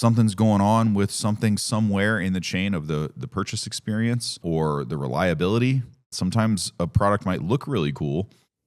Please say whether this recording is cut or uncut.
cut